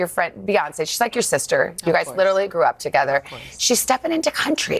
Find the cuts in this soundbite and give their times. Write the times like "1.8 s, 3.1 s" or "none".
none